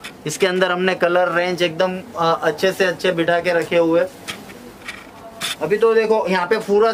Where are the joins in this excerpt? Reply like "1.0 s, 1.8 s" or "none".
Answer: none

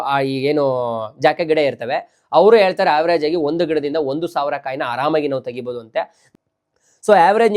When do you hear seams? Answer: 6.2 s

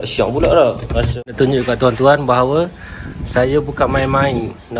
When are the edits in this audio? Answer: 1.1 s

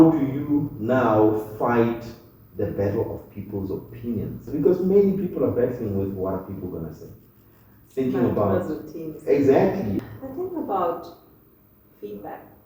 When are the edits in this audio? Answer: 4.5 s, 10.0 s

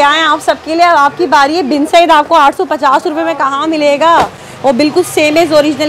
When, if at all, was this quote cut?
none

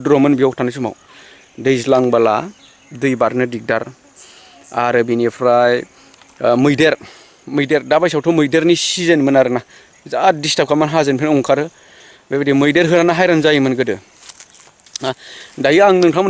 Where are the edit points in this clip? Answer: none

